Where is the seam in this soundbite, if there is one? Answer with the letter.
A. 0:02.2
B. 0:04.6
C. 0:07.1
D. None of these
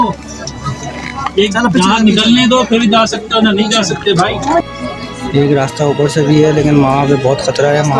B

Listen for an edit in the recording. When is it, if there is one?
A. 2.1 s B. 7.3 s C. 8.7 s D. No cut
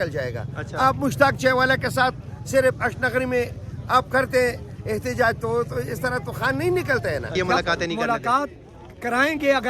B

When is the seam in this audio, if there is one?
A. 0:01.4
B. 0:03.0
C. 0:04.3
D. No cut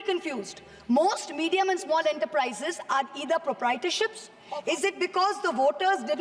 C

